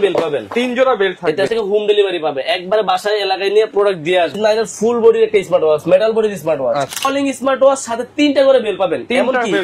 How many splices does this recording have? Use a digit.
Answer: 3